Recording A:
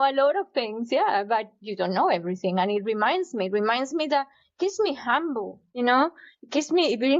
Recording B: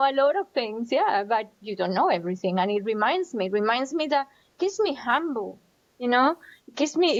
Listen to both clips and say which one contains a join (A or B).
A